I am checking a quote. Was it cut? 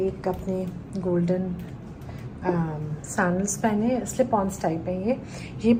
no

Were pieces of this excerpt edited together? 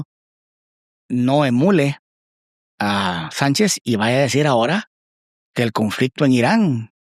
no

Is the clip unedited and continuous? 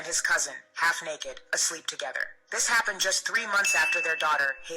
no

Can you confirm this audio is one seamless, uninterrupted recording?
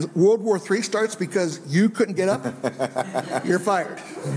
yes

